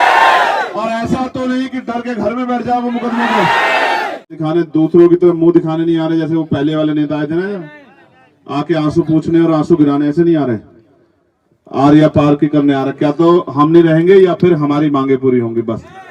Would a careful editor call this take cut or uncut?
cut